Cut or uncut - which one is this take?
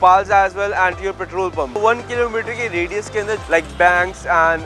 cut